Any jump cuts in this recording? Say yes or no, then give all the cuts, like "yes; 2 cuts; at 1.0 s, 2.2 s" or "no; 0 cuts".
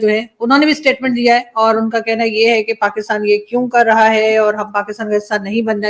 no; 0 cuts